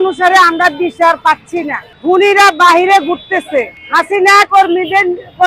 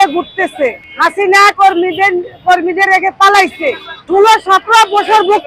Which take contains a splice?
second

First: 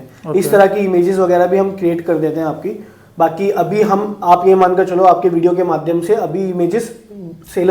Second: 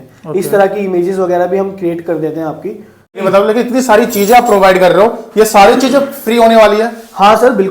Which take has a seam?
second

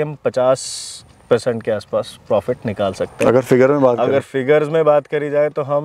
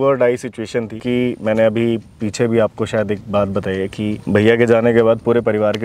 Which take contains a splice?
second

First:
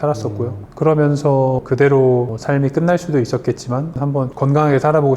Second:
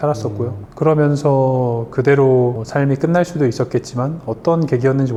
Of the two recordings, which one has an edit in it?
first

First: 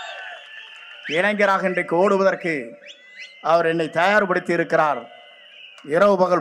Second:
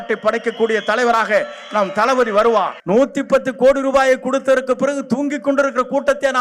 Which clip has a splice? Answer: second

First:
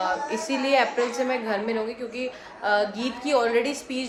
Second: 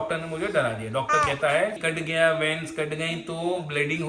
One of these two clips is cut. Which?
second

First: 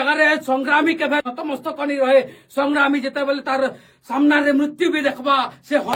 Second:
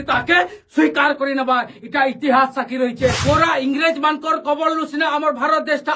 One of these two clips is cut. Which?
second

